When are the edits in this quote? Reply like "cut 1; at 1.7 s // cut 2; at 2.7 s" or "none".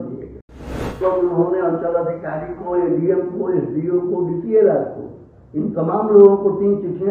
cut 1; at 1.0 s